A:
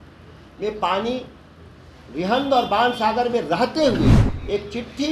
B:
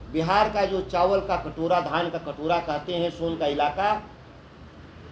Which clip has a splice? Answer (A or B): A